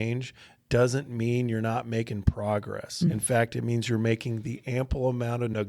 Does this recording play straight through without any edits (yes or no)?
no